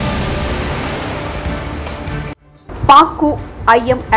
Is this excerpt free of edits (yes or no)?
no